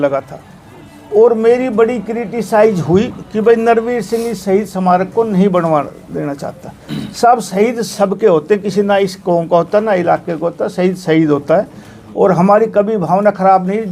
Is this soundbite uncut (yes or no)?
yes